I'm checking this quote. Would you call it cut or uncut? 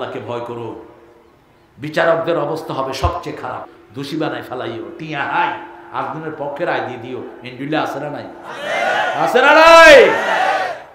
cut